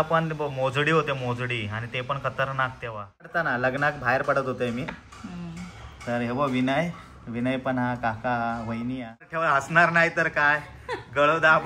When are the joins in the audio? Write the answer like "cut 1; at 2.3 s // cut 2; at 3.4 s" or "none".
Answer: cut 1; at 3.5 s // cut 2; at 9.4 s